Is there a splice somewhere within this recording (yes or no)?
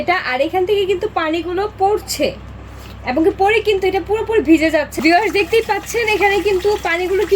yes